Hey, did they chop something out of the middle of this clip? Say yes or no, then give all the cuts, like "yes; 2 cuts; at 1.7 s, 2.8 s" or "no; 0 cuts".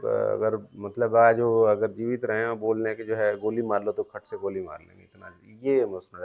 no; 0 cuts